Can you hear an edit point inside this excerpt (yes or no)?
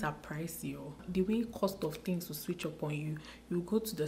no